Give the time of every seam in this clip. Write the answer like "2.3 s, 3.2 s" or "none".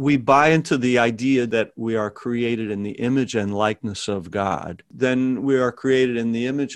1.5 s, 4.9 s